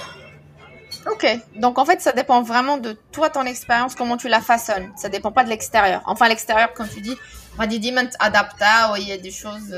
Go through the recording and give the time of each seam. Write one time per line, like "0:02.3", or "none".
none